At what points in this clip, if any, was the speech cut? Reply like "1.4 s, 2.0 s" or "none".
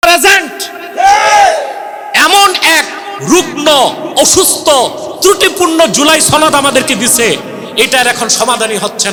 none